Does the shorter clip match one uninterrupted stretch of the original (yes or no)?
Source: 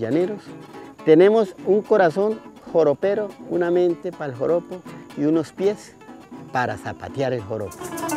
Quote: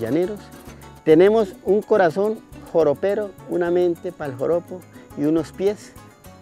yes